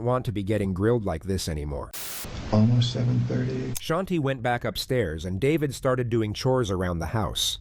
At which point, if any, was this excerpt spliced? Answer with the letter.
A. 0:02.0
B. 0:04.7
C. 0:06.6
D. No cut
A